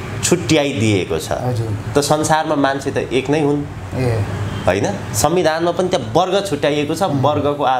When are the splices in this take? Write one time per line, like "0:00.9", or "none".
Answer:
none